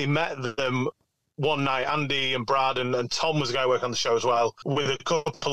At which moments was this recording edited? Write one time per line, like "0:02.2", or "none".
0:04.6

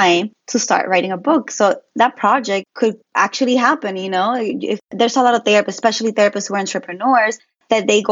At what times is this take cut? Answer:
0:02.9

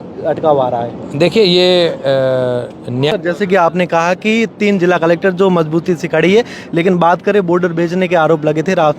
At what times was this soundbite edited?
0:03.1

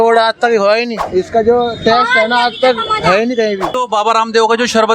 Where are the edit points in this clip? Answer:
0:01.0
0:03.7

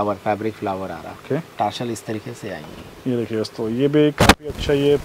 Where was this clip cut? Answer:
none

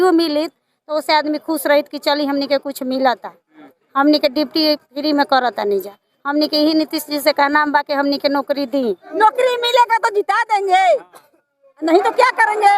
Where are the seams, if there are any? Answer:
0:09.0

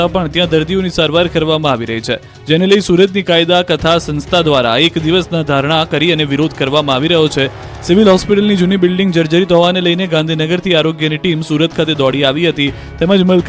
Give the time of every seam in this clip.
none

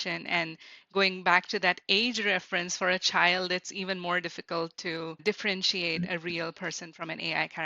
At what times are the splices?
0:05.2

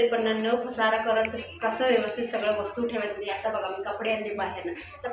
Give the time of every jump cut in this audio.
none

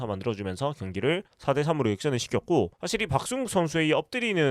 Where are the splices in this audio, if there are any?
0:02.8

